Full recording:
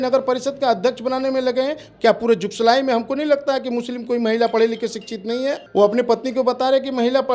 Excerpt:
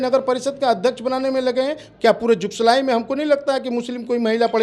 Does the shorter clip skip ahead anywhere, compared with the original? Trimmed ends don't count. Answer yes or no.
no